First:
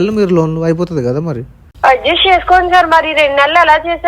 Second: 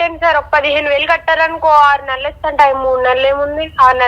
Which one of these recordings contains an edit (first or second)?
first